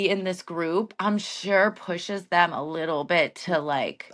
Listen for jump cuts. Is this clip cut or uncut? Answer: uncut